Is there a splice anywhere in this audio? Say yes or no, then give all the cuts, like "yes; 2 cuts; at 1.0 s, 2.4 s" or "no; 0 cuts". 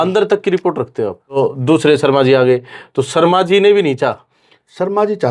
yes; 1 cut; at 1.4 s